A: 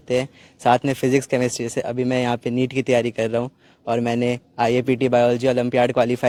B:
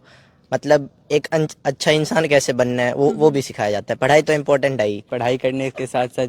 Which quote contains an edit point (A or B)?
B